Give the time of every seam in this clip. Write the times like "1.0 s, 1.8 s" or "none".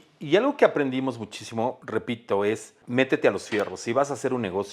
1.8 s, 2.7 s